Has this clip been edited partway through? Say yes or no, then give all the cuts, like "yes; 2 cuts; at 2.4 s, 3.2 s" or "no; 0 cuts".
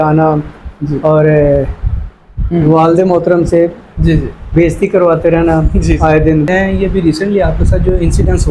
yes; 1 cut; at 6.5 s